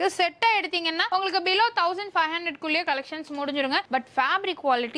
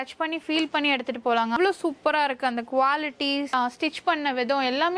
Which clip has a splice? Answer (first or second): second